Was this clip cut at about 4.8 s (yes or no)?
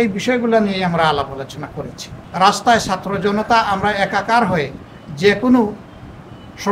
no